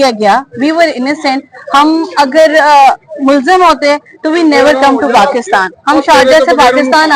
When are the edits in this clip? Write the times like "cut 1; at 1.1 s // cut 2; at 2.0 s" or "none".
none